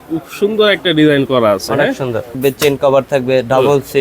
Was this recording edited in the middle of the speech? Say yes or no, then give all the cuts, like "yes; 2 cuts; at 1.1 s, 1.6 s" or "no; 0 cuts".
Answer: yes; 1 cut; at 2.3 s